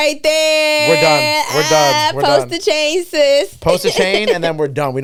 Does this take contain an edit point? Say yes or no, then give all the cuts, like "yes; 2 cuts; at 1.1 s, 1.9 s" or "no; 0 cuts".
no; 0 cuts